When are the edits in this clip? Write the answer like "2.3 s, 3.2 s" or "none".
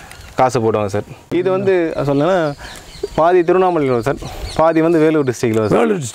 1.2 s